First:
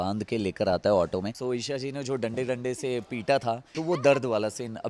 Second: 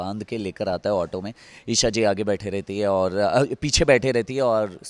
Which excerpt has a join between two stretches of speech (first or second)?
first